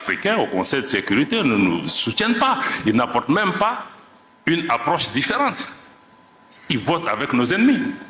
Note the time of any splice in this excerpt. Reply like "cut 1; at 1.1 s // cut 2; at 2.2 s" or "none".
none